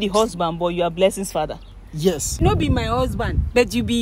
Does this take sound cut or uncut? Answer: cut